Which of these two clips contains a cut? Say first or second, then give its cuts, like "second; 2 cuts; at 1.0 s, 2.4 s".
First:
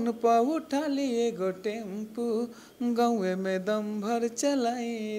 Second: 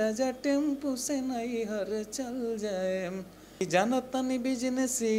second; 1 cut; at 3.6 s